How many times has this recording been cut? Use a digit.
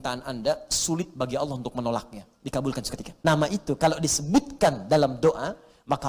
1